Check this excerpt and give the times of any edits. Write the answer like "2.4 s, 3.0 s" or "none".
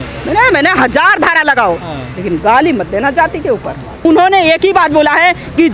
4.0 s